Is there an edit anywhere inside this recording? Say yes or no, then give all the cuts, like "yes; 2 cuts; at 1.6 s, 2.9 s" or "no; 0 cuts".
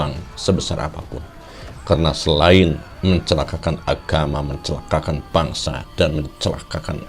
no; 0 cuts